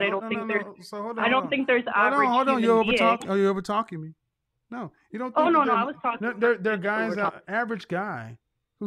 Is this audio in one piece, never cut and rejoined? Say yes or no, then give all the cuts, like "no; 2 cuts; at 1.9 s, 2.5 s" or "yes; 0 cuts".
yes; 0 cuts